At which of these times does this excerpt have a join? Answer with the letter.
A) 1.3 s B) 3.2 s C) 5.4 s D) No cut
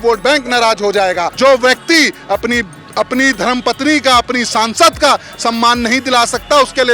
A